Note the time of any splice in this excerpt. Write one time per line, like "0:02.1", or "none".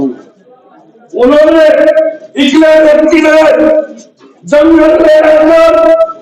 none

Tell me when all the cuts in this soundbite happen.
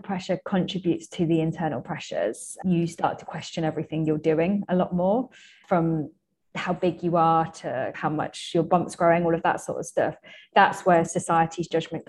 0:02.5
0:05.6
0:07.9

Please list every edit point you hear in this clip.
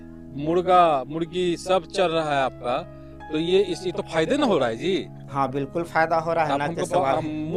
none

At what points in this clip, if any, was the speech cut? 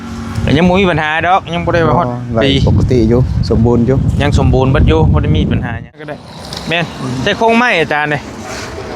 0:06.1

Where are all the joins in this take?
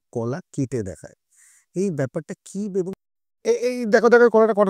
0:03.0

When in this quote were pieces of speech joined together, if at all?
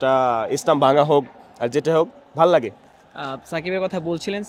none

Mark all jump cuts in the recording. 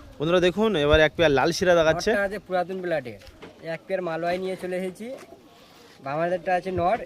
0:03.2

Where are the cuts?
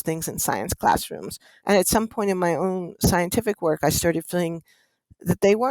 0:01.5

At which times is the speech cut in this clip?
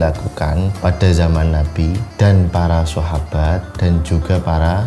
0:00.8
0:02.1
0:03.7

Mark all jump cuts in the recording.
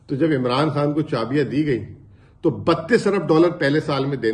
none

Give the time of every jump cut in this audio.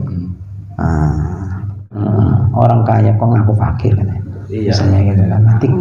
0:02.0

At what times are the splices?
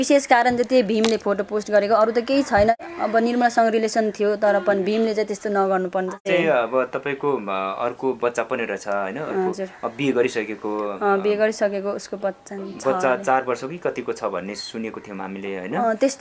none

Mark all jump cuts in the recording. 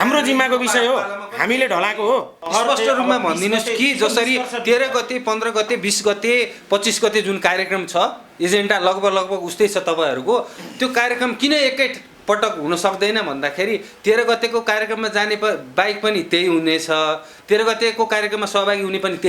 0:02.5

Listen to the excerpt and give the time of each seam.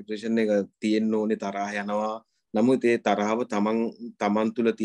none

